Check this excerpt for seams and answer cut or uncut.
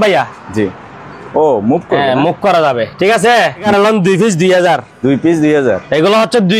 cut